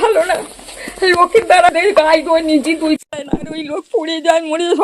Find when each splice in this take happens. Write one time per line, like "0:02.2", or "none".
0:03.6